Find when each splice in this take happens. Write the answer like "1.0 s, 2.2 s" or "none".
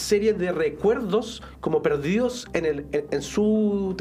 none